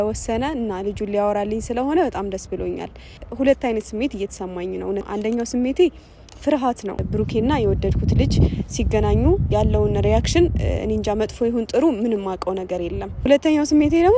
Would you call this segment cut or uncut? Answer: cut